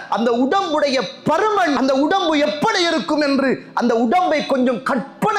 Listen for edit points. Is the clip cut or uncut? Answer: cut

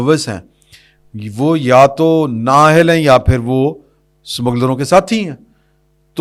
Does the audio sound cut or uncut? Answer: uncut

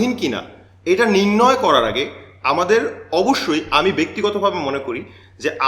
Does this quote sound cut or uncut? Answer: uncut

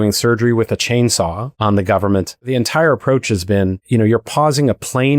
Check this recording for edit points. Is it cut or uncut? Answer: cut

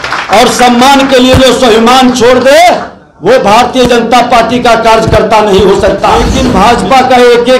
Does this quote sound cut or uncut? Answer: cut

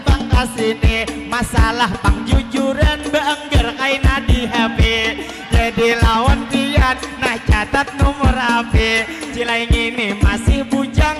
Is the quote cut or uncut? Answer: cut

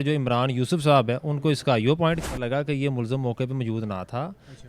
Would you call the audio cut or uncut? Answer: cut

